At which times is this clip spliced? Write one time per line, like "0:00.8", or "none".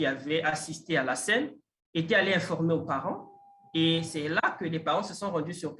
none